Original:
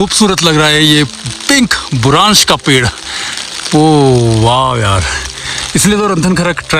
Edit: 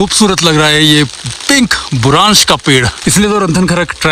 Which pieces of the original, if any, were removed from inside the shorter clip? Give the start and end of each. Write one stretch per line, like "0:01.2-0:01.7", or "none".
0:02.9-0:05.6